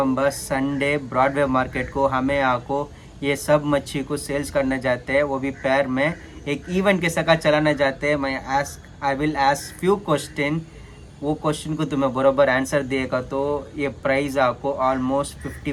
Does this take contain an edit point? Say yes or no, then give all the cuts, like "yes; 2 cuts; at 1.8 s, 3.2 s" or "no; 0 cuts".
no; 0 cuts